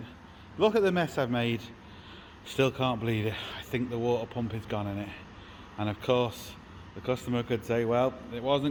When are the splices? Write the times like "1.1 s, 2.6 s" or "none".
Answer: none